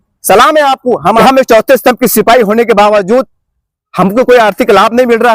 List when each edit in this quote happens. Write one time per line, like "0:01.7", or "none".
0:01.2